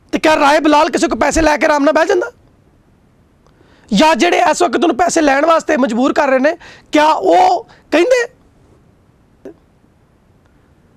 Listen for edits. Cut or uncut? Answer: cut